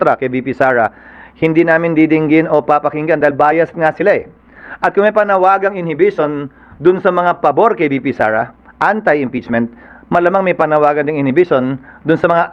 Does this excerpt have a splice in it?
no; 0 cuts

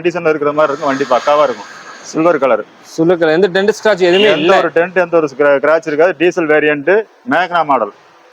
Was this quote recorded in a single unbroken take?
yes; 0 cuts

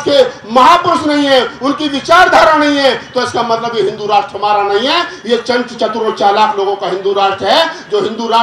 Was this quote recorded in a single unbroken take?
no; 1 cut; at 5.2 s

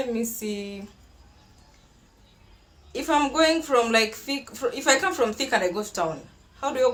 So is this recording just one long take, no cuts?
yes; 0 cuts

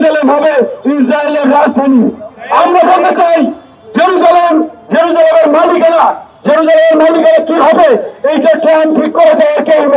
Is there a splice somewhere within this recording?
no; 0 cuts

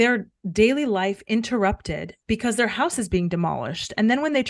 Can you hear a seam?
no; 0 cuts

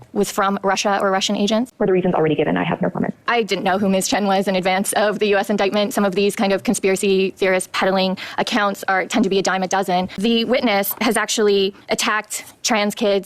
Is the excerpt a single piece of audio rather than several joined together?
no; 3 cuts; at 1.7 s, 3.2 s, 10.1 s

